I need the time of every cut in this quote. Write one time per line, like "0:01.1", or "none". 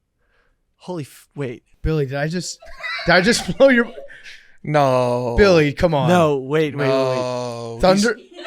0:01.7